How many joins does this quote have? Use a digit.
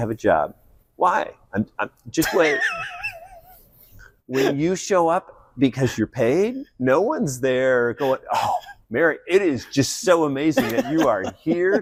0